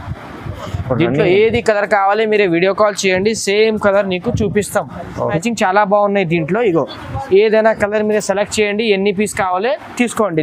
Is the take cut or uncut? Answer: cut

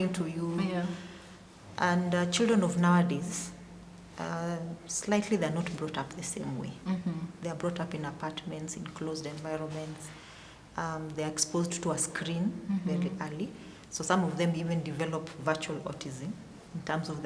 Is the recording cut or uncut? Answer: uncut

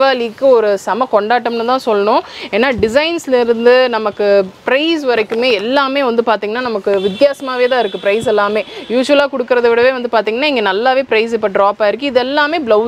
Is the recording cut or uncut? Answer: uncut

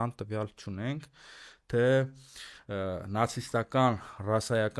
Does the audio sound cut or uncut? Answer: uncut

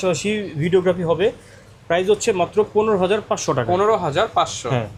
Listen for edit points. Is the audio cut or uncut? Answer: uncut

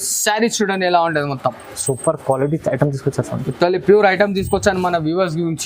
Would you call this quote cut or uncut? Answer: uncut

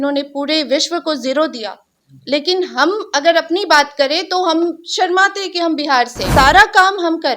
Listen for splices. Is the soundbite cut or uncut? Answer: cut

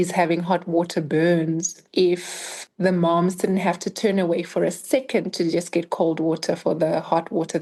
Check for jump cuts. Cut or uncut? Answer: uncut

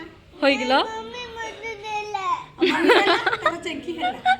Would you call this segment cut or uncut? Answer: uncut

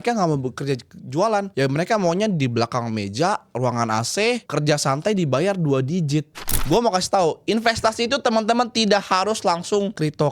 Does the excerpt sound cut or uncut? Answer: cut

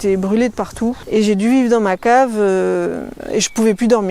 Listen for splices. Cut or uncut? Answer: cut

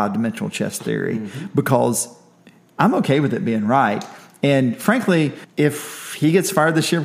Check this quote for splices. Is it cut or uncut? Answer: cut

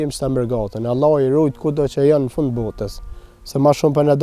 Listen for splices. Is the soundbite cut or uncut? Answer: uncut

